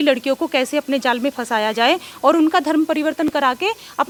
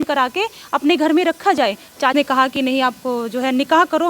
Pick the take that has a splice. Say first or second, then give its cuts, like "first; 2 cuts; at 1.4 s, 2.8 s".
second; 1 cut; at 2.1 s